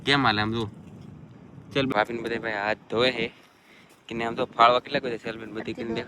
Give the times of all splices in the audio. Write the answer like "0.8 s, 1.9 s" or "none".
1.9 s